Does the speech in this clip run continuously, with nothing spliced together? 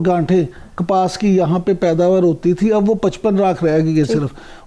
yes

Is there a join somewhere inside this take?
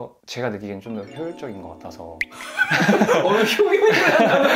no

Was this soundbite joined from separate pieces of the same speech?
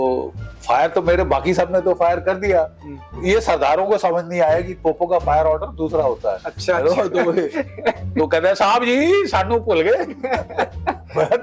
no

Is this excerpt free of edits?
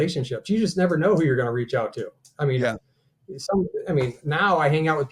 yes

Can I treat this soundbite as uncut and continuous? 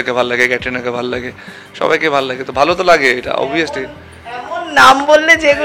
yes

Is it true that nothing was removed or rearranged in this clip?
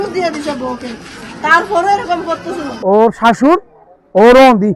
no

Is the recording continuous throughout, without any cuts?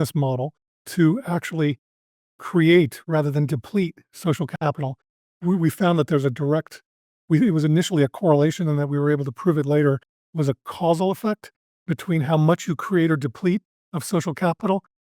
yes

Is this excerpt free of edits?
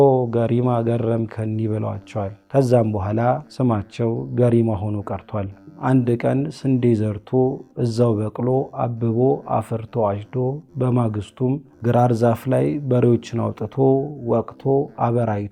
no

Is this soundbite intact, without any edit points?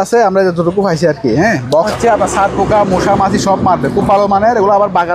no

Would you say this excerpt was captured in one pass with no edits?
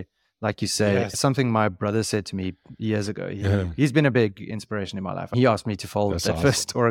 no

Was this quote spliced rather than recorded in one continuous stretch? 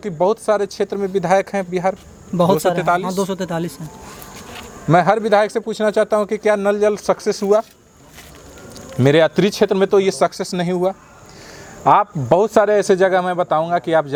no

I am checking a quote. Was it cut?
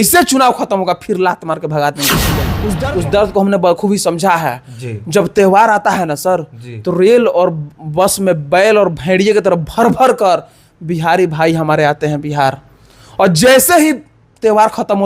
yes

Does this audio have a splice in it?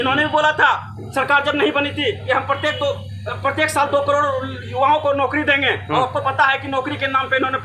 no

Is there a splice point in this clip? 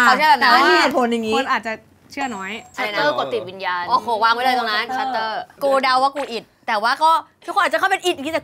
yes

